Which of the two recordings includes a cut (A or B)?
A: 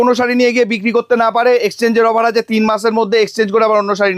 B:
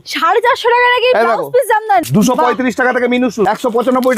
B